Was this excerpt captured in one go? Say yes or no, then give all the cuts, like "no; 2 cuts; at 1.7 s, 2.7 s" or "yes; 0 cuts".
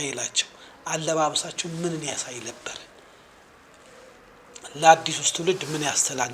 yes; 0 cuts